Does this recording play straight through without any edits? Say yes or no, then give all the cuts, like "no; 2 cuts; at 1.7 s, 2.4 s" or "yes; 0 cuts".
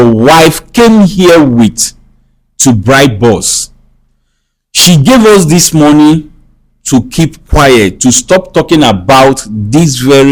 yes; 0 cuts